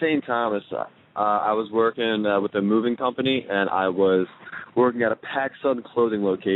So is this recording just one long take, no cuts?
no; 1 cut; at 3.9 s

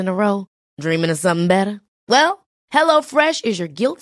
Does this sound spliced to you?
no; 0 cuts

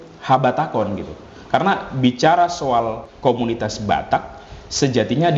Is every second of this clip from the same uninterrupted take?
no; 1 cut; at 3.0 s

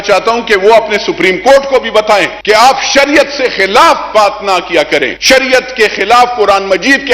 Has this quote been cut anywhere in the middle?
yes; 2 cuts; at 2.3 s, 5.1 s

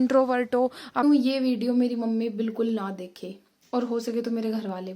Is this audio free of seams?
no; 1 cut; at 1.0 s

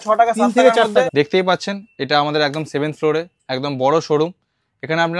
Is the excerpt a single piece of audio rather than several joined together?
no; 1 cut; at 1.1 s

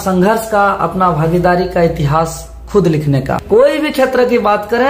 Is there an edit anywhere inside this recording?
yes; 1 cut; at 3.4 s

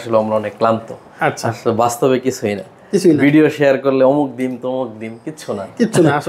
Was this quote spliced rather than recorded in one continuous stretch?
no; 0 cuts

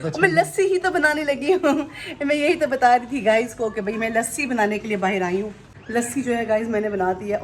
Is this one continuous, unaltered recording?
yes; 0 cuts

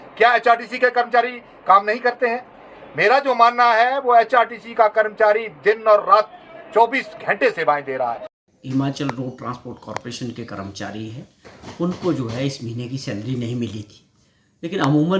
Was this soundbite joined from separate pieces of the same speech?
yes; 1 cut; at 8.3 s

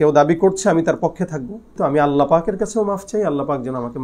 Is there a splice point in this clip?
yes; 1 cut; at 1.7 s

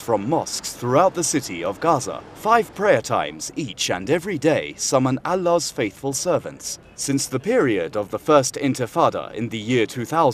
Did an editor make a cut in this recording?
yes; 1 cut; at 8.2 s

